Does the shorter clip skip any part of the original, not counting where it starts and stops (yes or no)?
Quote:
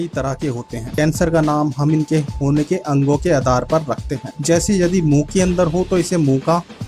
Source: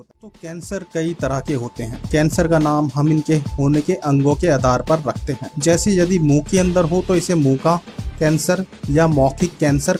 yes